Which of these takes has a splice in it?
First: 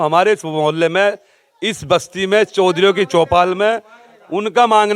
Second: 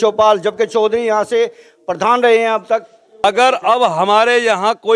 second; 1 cut; at 3.2 s

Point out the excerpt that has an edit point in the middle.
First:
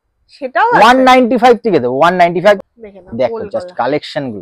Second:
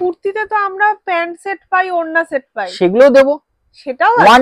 first; 1 cut; at 2.6 s

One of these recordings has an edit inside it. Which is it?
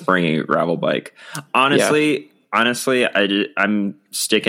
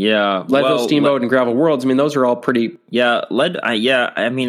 second; 1 cut; at 2.8 s

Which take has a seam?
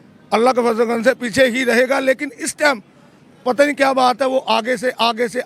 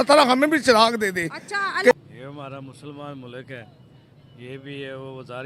second; 1 cut; at 1.9 s

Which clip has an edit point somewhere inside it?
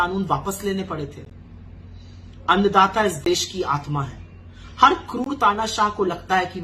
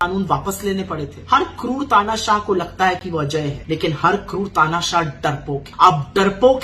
second; 3 cuts; at 1.1 s, 3.6 s, 5.7 s

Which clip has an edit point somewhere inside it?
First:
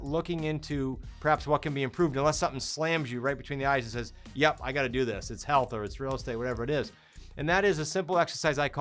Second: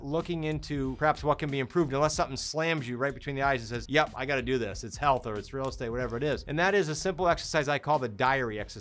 second; 3 cuts; at 0.9 s, 3.8 s, 6.5 s

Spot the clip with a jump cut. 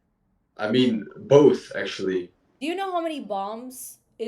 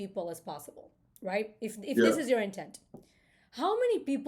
first; 1 cut; at 2.5 s

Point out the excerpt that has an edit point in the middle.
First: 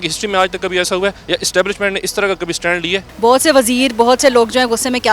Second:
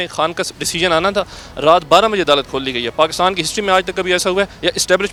first; 1 cut; at 3.0 s

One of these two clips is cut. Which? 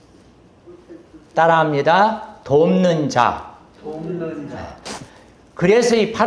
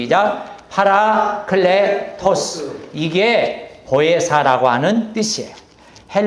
first; 1 cut; at 4.7 s

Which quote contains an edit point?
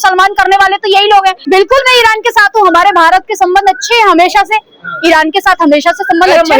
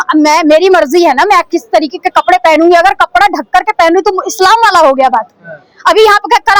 first; 1 cut; at 1.4 s

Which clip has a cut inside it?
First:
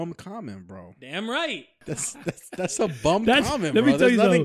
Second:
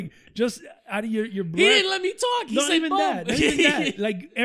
first; 1 cut; at 2.1 s

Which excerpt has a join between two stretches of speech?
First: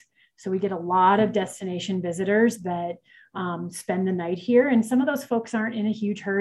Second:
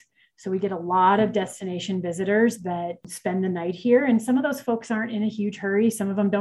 second; 1 cut; at 3.1 s

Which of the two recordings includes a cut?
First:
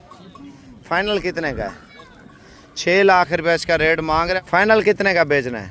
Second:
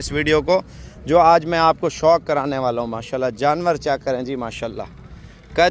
first; 1 cut; at 4.4 s

